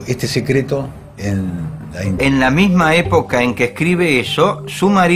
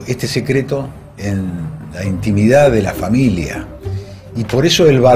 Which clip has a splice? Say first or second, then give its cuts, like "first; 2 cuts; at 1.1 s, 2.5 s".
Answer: second; 1 cut; at 2.1 s